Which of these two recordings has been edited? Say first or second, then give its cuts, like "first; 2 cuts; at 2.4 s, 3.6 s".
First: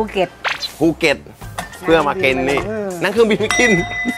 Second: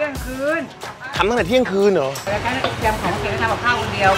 second; 1 cut; at 2.2 s